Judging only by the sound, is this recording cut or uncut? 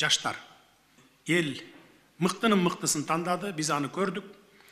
cut